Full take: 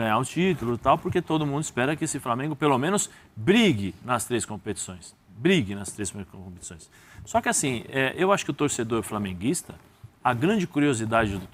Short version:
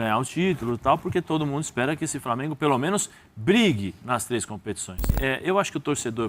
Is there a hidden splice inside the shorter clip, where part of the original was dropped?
yes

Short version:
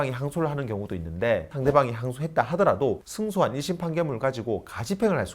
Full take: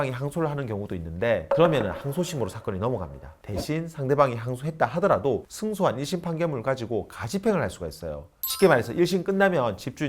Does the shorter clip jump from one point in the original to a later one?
yes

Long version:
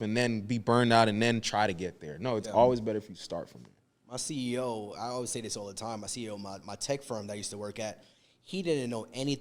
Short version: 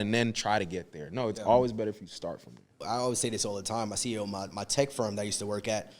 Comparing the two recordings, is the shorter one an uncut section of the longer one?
no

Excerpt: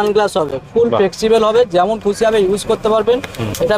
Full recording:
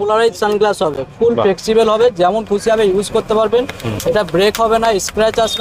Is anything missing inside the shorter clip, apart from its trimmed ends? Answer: no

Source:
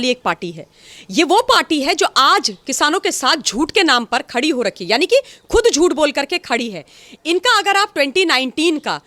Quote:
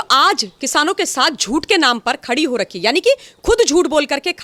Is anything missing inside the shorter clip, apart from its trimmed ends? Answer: no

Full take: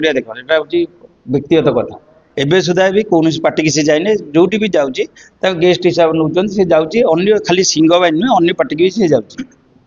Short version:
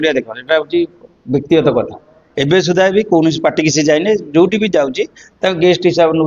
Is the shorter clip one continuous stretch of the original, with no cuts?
yes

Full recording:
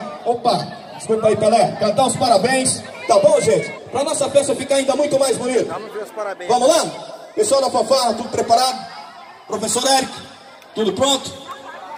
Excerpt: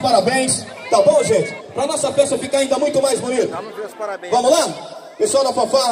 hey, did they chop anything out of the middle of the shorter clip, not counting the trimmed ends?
no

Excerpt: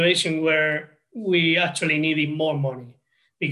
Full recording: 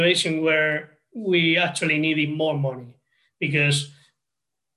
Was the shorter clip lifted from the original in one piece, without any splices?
yes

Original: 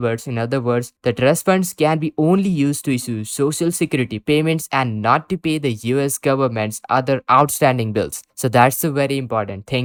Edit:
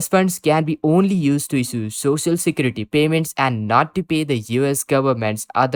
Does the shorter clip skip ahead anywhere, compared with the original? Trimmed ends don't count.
no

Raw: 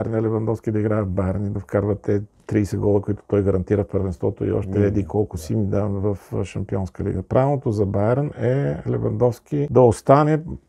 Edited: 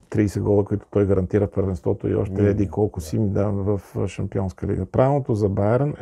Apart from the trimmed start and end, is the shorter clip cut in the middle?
no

